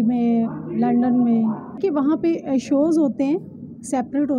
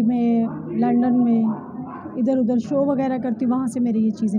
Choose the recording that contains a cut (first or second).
first